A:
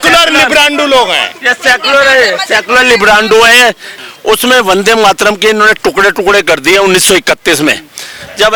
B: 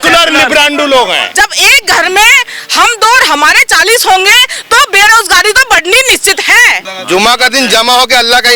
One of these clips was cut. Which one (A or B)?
B